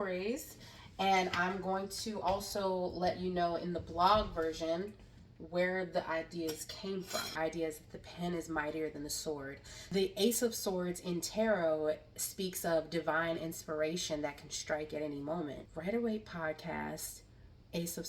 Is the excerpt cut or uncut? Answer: cut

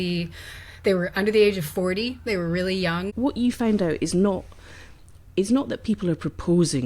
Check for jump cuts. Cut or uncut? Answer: cut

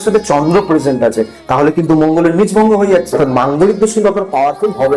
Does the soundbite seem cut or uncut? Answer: cut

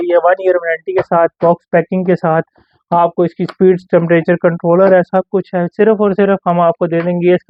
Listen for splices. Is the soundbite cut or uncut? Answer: uncut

